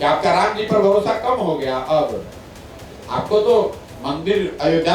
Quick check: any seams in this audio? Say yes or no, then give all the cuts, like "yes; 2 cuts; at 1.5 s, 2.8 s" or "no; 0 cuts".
no; 0 cuts